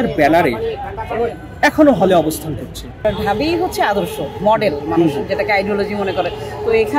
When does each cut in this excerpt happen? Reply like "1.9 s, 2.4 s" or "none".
2.9 s

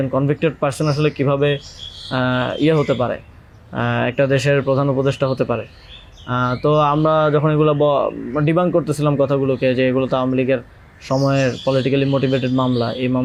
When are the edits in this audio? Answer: none

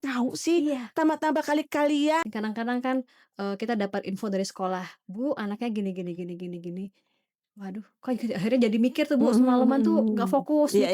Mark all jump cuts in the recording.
2.2 s

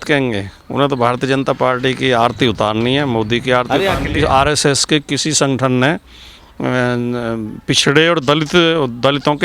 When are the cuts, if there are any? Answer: 4.0 s

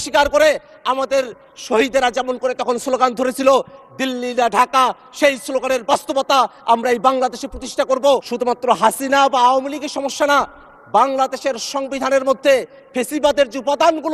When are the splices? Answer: 8.3 s

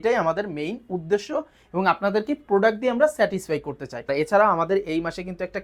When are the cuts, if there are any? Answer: 4.1 s

